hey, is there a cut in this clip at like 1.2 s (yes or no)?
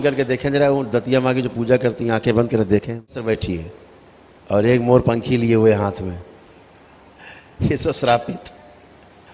no